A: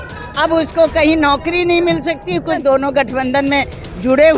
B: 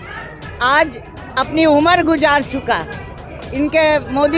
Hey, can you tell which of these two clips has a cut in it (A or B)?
A